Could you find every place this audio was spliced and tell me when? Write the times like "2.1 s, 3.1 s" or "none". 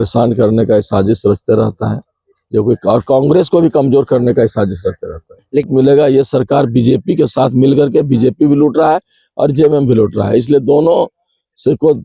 5.7 s